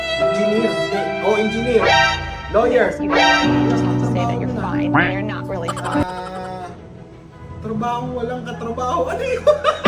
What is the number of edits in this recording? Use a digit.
0